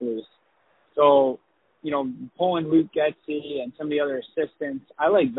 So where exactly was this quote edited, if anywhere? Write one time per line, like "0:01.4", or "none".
none